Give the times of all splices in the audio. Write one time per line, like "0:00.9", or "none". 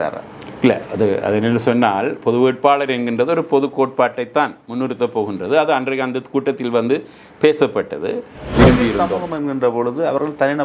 0:08.4

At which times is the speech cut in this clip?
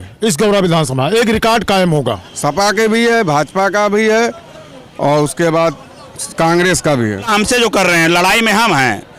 0:02.3
0:07.3

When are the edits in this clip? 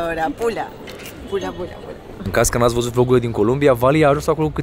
0:02.2

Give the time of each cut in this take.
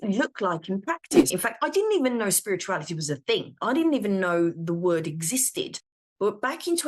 0:01.1

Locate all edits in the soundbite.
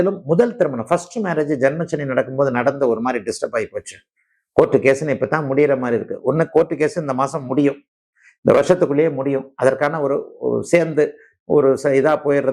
none

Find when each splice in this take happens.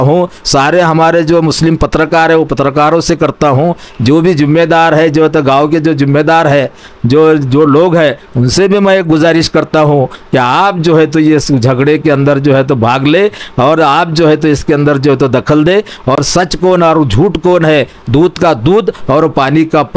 none

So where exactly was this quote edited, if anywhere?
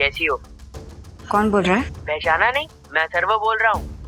none

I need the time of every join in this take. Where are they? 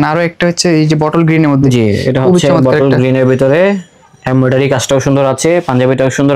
none

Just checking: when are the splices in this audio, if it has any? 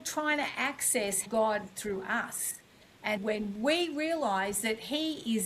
0:01.2
0:03.2

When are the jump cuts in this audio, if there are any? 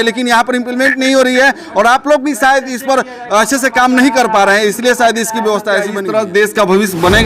0:06.0

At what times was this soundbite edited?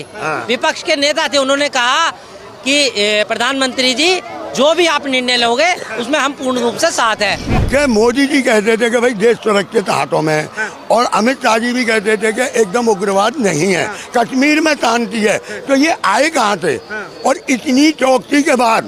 0:07.5

